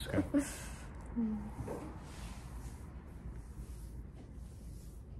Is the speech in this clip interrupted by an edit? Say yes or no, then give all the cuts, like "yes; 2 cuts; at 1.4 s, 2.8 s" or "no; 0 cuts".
no; 0 cuts